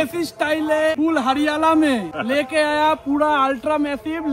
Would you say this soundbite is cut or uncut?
cut